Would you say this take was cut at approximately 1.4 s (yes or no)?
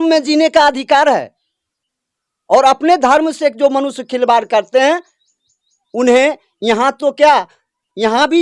no